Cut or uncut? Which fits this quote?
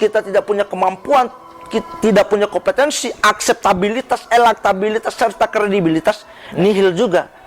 uncut